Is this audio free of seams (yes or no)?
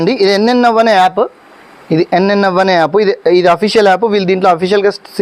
yes